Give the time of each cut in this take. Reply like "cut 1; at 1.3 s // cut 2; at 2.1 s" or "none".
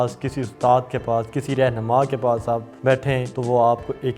cut 1; at 3.0 s